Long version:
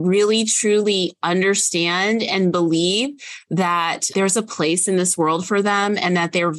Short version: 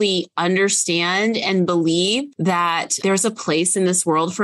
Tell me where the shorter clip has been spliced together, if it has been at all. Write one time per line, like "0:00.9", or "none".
0:02.3